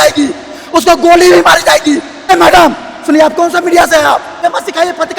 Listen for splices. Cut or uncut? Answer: cut